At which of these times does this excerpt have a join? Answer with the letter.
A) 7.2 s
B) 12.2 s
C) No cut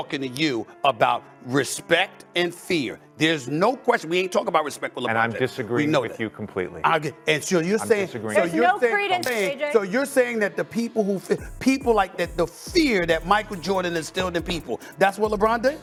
C